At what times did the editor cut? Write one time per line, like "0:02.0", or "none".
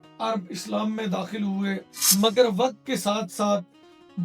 0:01.9